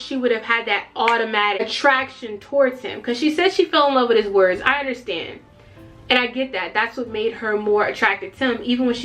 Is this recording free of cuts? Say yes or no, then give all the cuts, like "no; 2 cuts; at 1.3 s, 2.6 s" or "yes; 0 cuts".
no; 1 cut; at 1.6 s